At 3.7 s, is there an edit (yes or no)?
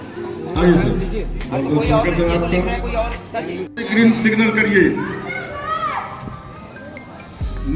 yes